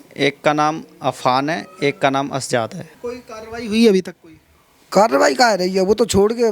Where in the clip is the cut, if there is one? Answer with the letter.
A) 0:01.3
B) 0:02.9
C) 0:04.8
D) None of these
B